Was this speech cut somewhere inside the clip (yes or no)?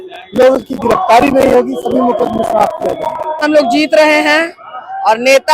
yes